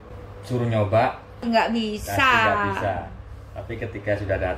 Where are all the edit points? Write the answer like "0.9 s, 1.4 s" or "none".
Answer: 1.4 s

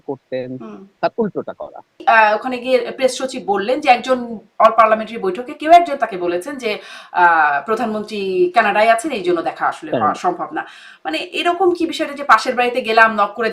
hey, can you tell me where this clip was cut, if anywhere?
2.0 s

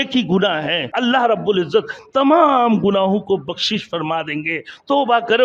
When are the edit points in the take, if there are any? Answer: 0.9 s

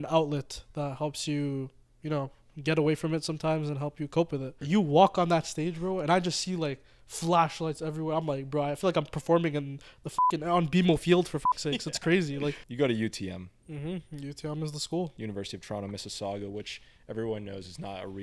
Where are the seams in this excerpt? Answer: 4.5 s, 12.6 s, 15.1 s

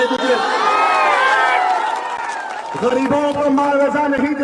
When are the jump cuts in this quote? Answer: none

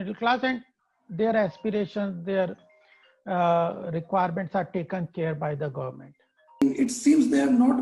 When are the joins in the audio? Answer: 6.6 s

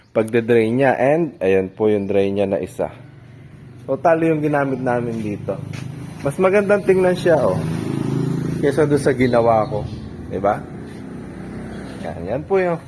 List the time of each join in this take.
none

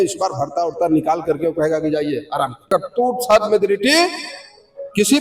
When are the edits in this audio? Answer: 2.7 s

